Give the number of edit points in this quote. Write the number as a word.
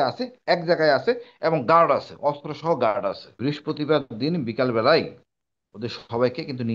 one